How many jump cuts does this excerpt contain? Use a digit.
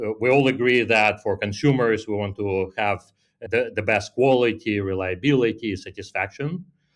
1